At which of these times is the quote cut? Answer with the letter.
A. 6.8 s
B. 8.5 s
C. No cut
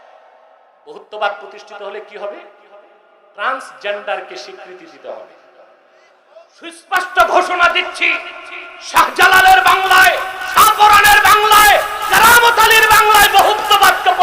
A